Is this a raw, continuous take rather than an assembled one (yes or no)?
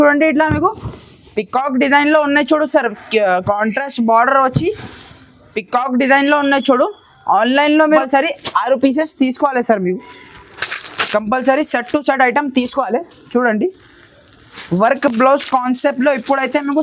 no